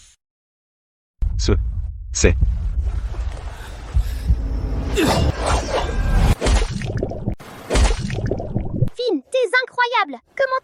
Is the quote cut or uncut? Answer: uncut